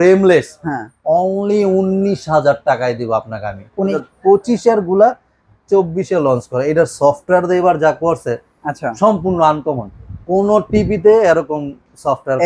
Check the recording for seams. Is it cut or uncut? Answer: cut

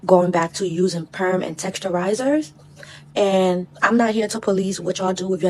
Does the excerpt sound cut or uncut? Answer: uncut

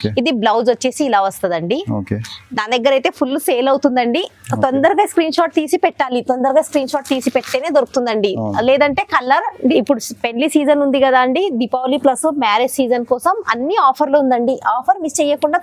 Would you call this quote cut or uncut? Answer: cut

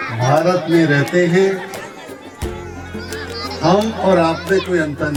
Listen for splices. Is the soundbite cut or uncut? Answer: uncut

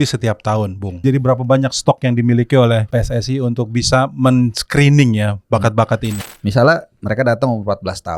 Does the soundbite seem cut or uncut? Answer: cut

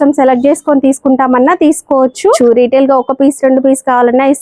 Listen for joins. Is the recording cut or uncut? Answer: cut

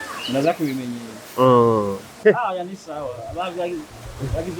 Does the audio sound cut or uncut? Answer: cut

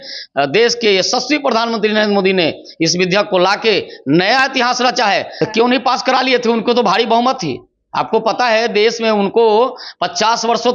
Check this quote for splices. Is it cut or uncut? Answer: cut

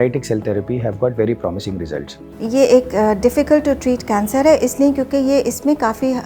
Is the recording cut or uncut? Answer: uncut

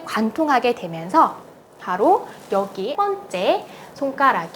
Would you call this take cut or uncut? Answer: cut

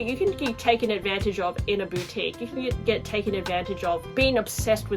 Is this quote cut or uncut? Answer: uncut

